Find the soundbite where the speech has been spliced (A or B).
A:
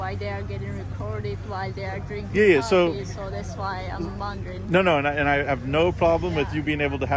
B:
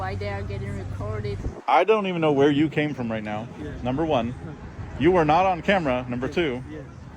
B